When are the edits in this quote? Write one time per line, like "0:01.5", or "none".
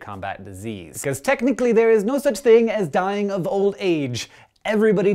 none

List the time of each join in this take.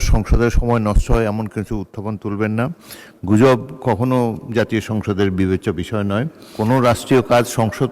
0:06.4

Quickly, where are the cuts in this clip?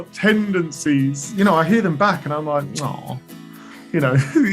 0:01.2

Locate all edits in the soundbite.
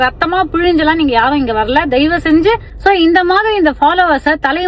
0:02.7

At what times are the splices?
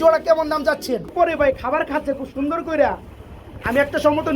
0:01.4

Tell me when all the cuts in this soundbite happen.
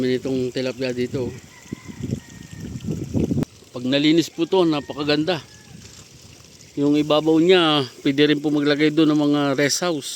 0:03.4

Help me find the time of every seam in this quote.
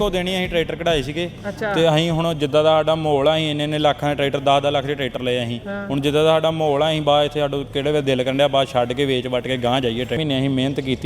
0:10.1

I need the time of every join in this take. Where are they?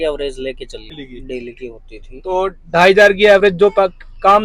0:00.9

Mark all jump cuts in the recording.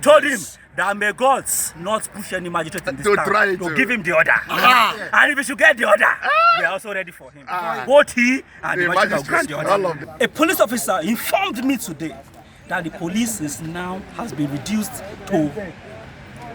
0:10.0

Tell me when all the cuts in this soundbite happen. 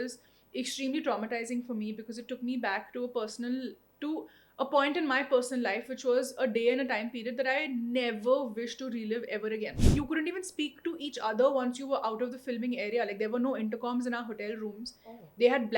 0:09.7

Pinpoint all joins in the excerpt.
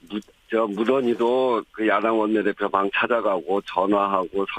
0:01.4

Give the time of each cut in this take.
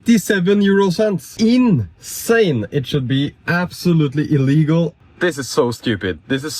0:01.2
0:05.0

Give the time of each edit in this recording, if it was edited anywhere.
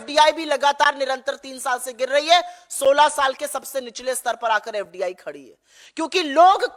none

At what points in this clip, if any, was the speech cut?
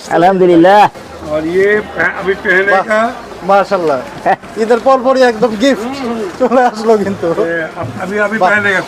none

